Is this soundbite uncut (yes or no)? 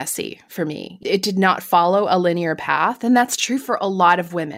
no